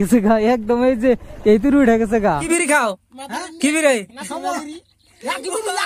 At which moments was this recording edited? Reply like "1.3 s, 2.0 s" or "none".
2.4 s